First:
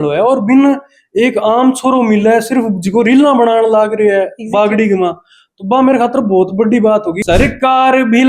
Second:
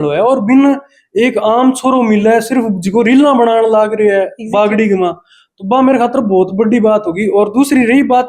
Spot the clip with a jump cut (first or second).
first